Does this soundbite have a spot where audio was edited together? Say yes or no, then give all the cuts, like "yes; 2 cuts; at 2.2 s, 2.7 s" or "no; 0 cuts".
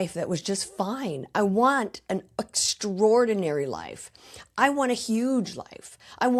no; 0 cuts